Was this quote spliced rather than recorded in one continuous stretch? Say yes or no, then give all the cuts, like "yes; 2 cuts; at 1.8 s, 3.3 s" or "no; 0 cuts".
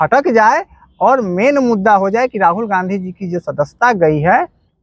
no; 0 cuts